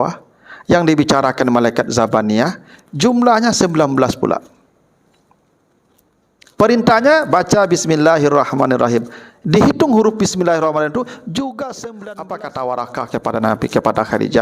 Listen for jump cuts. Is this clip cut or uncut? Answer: cut